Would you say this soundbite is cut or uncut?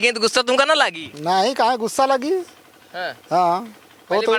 uncut